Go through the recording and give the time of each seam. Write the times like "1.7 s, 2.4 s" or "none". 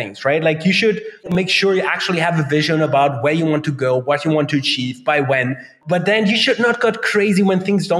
1.3 s, 5.7 s